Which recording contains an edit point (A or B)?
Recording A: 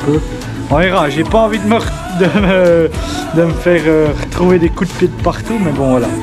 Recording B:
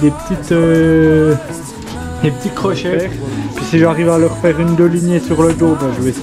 B